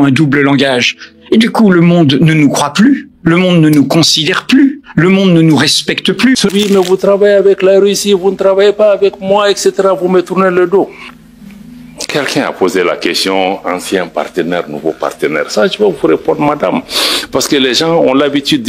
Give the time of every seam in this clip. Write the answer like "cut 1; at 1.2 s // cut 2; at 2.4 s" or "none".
cut 1; at 6.5 s